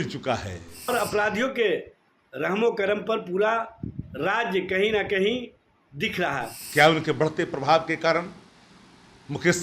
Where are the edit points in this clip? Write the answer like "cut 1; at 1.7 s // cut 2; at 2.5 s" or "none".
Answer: cut 1; at 0.9 s // cut 2; at 6.6 s

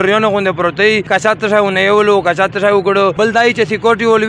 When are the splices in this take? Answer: cut 1; at 1.0 s // cut 2; at 3.1 s

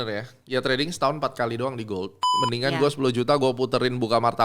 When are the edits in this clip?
cut 1; at 2.4 s

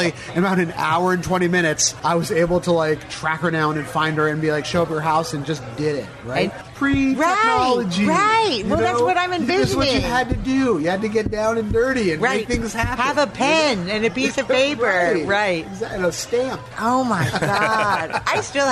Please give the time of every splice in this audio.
cut 1; at 1.9 s // cut 2; at 6.6 s

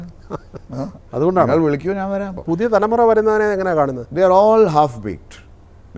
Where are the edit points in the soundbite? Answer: cut 1; at 2.4 s

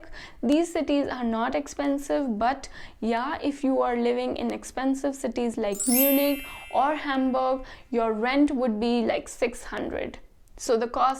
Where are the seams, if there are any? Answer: none

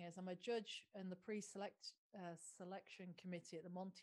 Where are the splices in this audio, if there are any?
none

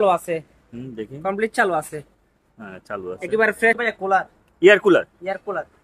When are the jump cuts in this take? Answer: cut 1; at 3.8 s

